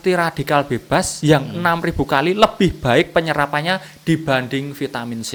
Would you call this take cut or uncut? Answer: uncut